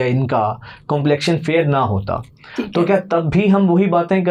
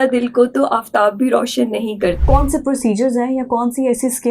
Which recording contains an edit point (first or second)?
second